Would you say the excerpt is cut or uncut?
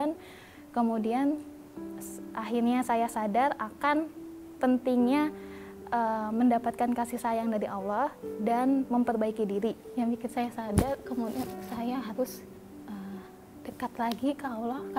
cut